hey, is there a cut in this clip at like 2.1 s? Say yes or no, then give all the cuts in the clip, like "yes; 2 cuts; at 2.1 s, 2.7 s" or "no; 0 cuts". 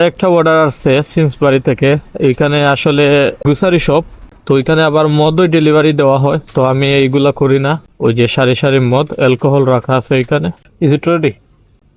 no; 0 cuts